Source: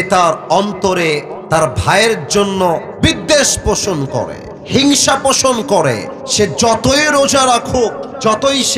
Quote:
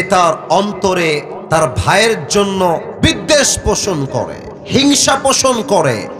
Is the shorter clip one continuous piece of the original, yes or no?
yes